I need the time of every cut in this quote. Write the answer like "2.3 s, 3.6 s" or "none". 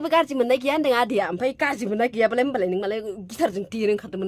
none